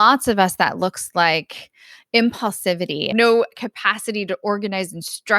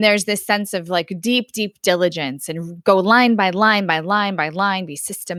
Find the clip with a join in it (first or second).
first